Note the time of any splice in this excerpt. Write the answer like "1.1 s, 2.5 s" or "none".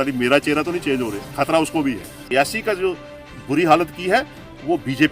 2.2 s